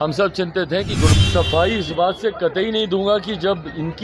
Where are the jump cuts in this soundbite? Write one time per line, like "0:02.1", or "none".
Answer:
0:01.1